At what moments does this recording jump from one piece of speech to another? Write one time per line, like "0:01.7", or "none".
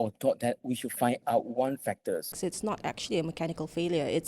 0:02.4